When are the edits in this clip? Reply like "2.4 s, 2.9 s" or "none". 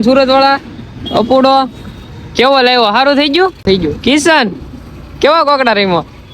3.6 s